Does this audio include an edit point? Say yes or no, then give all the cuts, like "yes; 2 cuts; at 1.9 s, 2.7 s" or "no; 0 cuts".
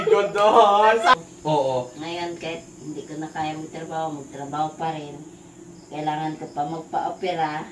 yes; 1 cut; at 1.1 s